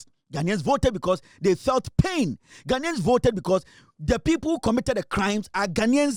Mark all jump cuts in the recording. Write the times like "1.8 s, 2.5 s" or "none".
none